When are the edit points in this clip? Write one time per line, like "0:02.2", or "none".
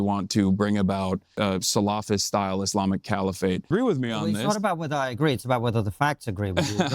0:01.3
0:03.7